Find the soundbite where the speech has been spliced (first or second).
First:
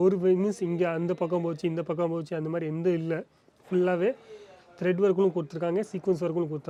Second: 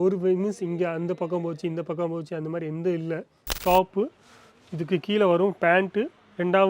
second